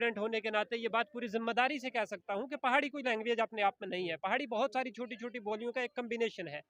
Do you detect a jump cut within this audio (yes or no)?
no